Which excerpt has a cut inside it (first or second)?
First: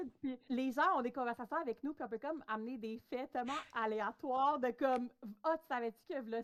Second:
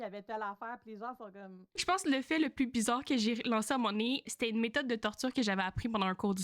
second